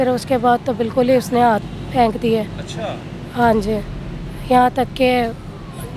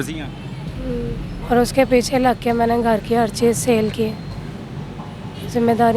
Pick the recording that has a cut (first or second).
second